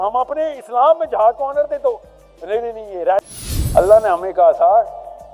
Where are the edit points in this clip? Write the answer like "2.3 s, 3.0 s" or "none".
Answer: 3.3 s